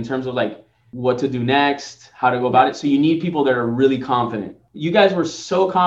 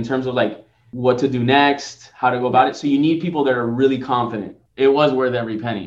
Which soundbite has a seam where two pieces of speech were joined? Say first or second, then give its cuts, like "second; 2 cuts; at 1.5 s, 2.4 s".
second; 1 cut; at 4.6 s